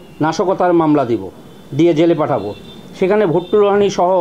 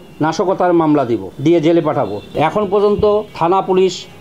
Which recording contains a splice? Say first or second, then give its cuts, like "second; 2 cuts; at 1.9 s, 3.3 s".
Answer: second; 3 cuts; at 1.3 s, 2.3 s, 3.3 s